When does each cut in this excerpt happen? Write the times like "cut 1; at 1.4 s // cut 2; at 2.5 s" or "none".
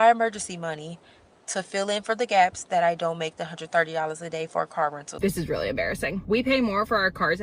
cut 1; at 3.6 s // cut 2; at 5.1 s